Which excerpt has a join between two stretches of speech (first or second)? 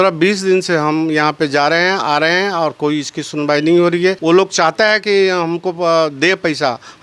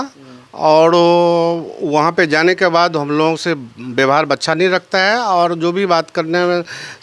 first